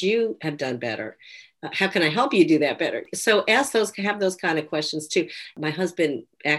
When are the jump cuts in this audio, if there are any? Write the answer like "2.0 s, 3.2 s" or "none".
3.0 s, 5.5 s